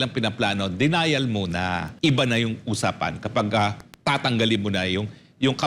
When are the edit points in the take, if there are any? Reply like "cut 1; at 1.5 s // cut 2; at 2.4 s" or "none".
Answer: cut 1; at 1.9 s